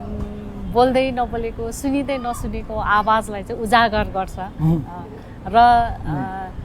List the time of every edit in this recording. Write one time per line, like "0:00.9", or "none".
none